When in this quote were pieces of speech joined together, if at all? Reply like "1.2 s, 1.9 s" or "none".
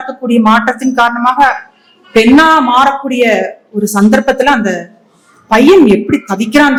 none

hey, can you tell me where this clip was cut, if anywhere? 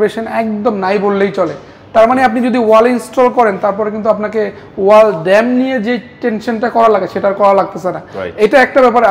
none

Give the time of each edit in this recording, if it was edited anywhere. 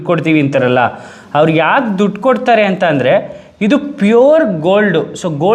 none

